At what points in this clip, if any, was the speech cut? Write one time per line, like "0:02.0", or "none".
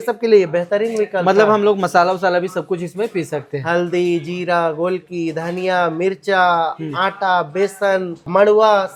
none

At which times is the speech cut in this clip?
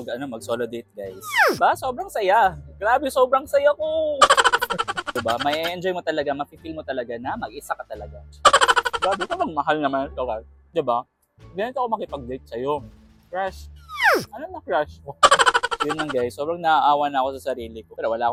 none

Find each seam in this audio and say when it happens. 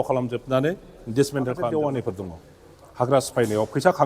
0:01.6

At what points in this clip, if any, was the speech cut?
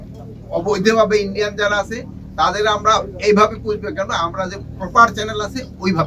none

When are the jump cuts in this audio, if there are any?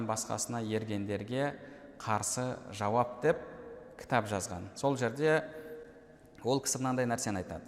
none

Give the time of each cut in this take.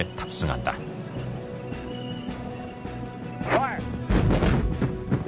0:02.8

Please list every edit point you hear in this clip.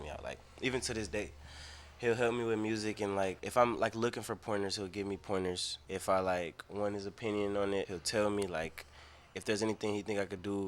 0:03.4
0:05.7
0:08.0

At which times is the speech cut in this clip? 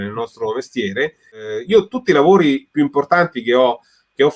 0:01.5

